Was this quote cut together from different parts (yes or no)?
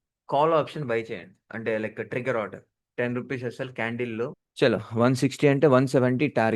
yes